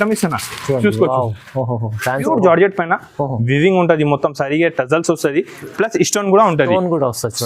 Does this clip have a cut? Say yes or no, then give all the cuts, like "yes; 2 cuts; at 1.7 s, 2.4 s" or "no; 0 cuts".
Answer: yes; 1 cut; at 2.2 s